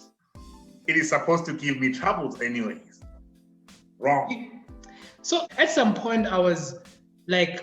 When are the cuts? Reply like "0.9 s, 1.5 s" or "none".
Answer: 5.5 s